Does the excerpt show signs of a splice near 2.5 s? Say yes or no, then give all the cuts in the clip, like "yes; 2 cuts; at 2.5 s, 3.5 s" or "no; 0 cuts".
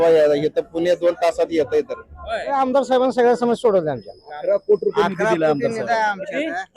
yes; 1 cut; at 2.5 s